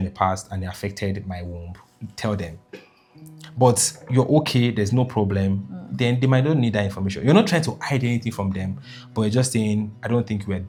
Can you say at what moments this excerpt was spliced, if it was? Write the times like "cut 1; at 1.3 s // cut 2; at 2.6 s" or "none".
none